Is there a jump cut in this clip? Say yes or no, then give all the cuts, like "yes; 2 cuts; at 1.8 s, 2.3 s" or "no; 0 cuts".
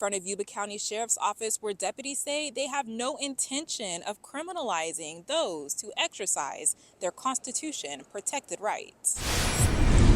yes; 1 cut; at 9.1 s